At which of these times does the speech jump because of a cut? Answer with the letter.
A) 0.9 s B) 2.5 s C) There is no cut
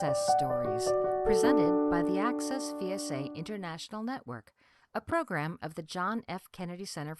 B